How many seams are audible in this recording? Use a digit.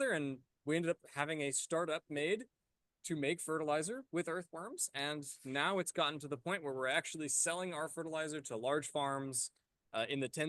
0